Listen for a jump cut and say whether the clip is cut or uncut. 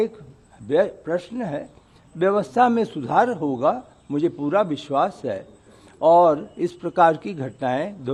uncut